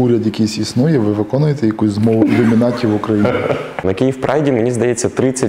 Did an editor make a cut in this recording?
yes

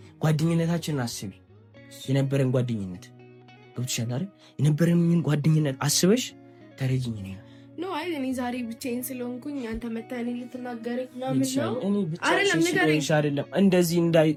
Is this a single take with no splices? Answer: yes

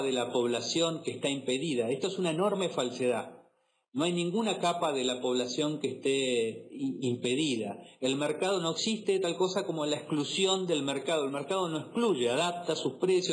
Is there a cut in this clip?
yes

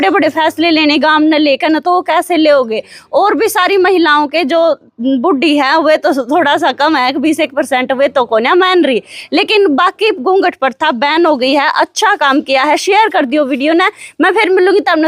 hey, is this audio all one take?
yes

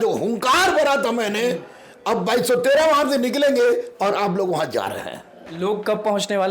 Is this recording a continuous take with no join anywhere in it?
yes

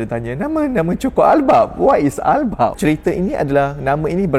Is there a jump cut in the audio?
yes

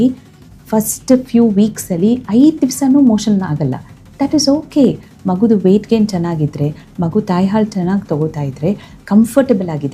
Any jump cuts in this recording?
no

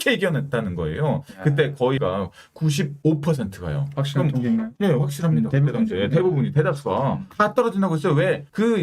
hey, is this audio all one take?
yes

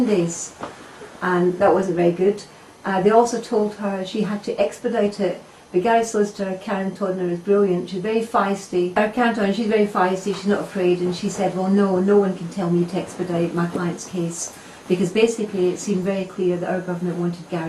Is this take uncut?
no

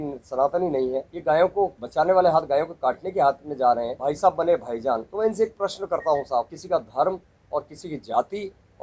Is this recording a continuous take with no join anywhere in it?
no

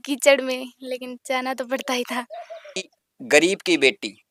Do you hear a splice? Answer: no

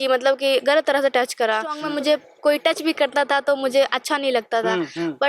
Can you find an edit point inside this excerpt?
yes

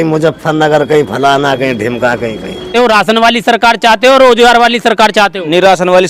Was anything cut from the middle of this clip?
yes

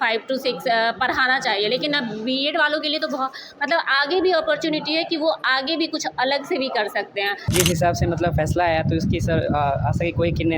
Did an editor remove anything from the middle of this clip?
yes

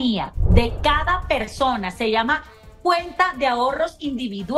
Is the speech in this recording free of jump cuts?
yes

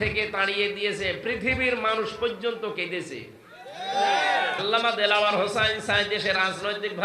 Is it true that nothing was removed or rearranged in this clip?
no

